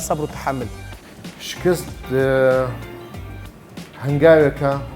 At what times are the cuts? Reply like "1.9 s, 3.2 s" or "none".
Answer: 1.2 s